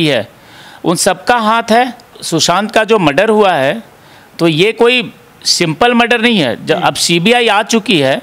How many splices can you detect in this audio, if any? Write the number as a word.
one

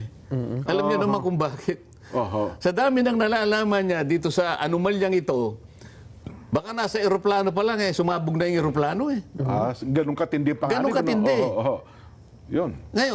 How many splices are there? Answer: zero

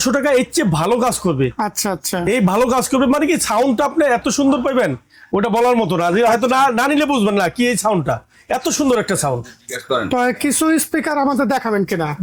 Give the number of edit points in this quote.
zero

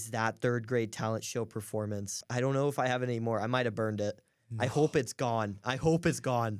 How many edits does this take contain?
one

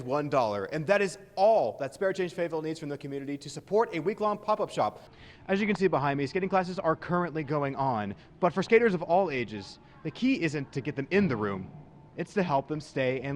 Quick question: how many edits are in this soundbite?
one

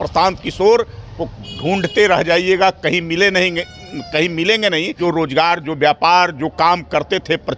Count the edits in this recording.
one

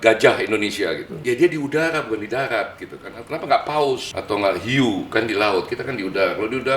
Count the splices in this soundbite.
two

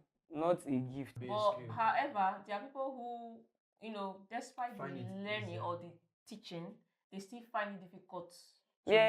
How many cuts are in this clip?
one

